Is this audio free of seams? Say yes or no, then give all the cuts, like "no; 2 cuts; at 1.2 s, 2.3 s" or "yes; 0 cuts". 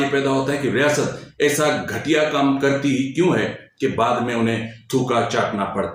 yes; 0 cuts